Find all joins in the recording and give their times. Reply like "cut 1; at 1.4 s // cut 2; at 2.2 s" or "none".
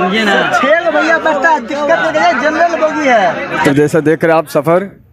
cut 1; at 3.6 s